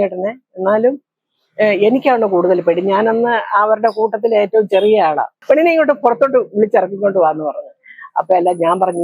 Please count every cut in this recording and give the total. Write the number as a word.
one